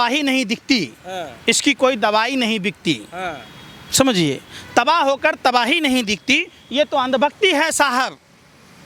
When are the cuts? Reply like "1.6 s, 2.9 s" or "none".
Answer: none